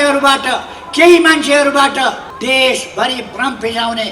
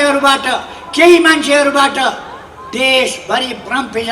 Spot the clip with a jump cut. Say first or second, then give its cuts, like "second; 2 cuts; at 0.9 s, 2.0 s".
first; 1 cut; at 2.3 s